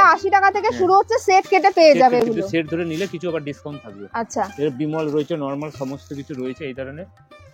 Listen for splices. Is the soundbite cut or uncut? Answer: uncut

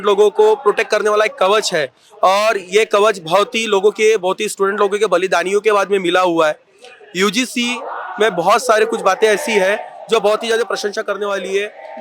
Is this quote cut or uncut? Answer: uncut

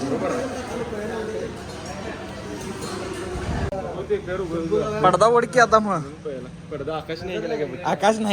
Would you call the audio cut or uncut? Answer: cut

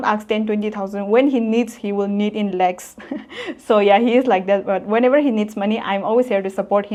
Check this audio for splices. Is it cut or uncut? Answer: uncut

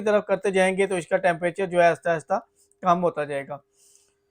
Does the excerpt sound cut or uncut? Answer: uncut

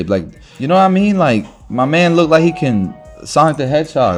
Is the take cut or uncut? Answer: uncut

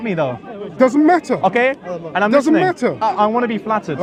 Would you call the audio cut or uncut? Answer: uncut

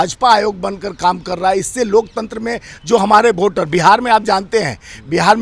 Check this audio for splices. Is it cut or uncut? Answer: uncut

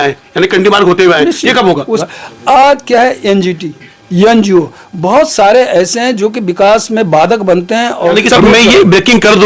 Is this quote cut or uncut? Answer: cut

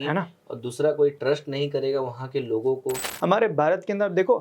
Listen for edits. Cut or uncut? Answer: cut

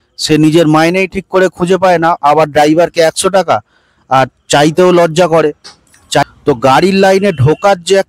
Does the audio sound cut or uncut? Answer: cut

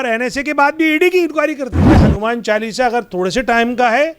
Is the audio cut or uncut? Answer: cut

